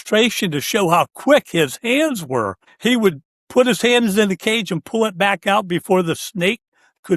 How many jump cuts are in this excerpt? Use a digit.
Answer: 1